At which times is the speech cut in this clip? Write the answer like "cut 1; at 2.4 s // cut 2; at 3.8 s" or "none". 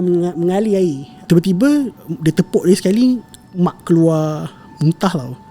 cut 1; at 1.2 s